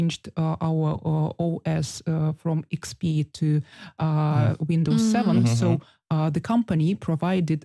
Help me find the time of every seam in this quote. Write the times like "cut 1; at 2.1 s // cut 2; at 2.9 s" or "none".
none